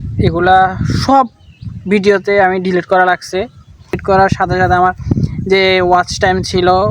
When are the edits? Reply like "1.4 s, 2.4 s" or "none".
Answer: 4.0 s